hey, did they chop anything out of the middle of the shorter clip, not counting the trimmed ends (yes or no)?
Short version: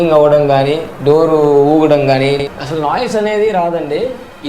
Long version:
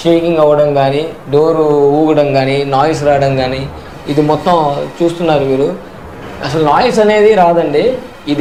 yes